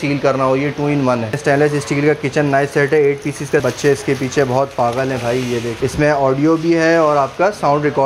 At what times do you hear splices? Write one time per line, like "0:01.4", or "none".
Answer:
0:01.4
0:03.6
0:05.7